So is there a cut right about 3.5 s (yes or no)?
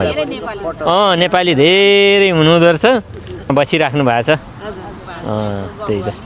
yes